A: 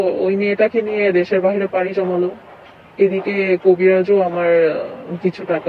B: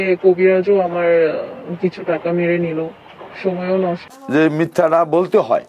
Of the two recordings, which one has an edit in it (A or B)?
B